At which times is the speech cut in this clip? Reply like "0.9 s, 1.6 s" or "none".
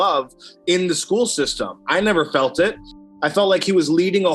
3.1 s